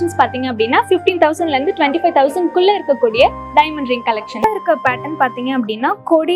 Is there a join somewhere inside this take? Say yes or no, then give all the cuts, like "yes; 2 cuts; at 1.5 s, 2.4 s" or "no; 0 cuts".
yes; 1 cut; at 4.4 s